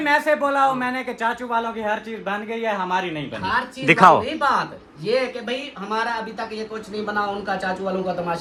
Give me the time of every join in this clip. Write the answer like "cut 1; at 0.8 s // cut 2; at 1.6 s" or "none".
none